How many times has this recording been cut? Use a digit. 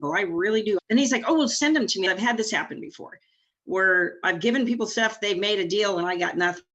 2